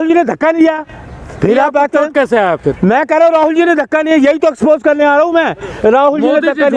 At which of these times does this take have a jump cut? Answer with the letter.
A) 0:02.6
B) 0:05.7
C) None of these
C